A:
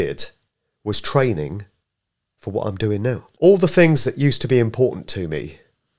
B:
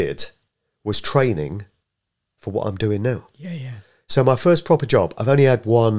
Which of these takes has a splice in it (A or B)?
A